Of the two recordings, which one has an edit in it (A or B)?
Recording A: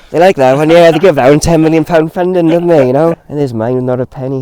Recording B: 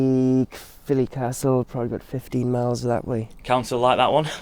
A